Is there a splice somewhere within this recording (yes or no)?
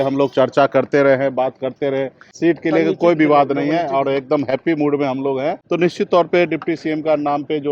yes